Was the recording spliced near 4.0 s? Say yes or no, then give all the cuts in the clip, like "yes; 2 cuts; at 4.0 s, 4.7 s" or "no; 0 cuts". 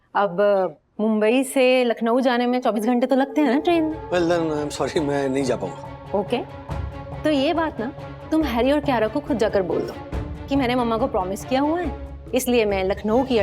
yes; 1 cut; at 4.0 s